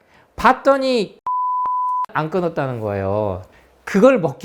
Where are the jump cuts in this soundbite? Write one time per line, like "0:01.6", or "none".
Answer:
0:03.5